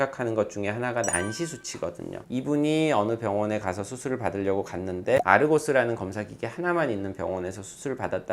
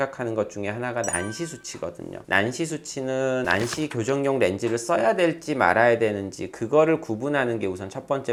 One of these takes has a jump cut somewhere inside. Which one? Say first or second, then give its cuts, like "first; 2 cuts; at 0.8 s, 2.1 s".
first; 2 cuts; at 2.1 s, 5.2 s